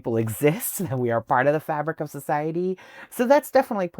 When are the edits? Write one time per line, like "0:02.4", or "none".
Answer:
0:03.0